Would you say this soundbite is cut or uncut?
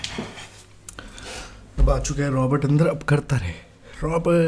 uncut